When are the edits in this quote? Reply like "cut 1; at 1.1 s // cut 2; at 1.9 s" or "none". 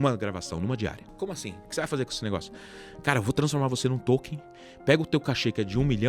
cut 1; at 1.0 s